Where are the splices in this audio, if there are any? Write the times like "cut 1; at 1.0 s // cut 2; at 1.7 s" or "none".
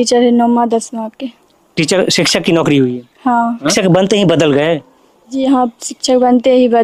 cut 1; at 3.7 s // cut 2; at 5.4 s